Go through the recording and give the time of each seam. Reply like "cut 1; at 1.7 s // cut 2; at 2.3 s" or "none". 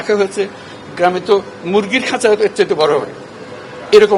none